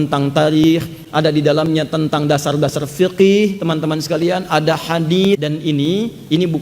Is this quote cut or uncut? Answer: cut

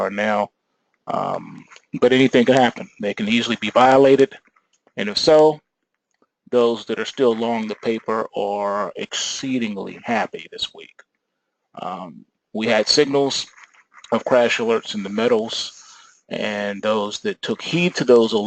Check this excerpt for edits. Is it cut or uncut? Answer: cut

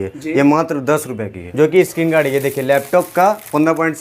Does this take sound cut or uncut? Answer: cut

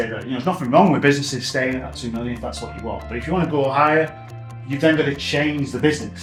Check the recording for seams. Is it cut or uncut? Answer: uncut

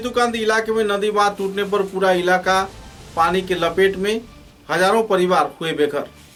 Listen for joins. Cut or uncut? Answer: uncut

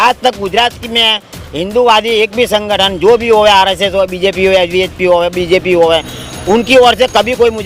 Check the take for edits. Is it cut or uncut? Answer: uncut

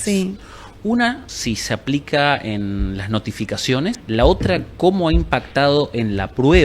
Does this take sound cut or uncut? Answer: cut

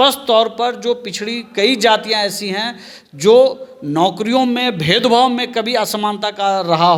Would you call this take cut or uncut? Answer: uncut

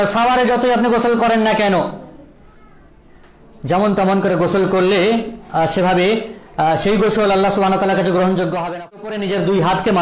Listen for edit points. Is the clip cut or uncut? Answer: cut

